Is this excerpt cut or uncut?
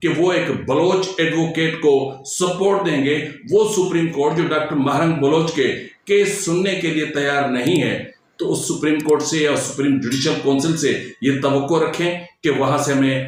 uncut